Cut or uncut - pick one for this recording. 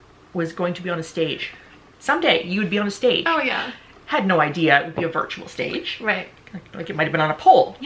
uncut